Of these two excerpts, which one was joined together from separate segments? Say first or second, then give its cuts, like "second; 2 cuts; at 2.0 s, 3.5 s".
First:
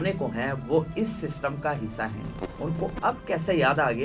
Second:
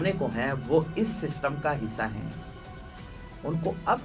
first; 1 cut; at 2.4 s